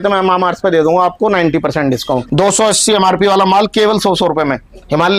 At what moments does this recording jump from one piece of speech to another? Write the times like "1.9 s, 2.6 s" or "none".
2.2 s